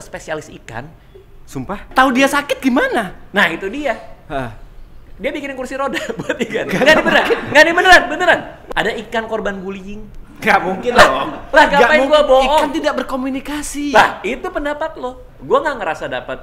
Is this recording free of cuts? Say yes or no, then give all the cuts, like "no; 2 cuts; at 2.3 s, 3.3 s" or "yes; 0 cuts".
no; 3 cuts; at 1.8 s, 8.6 s, 15.2 s